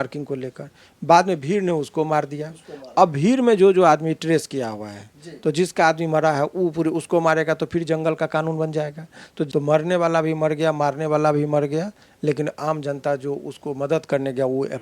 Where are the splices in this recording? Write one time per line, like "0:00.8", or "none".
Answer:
0:09.5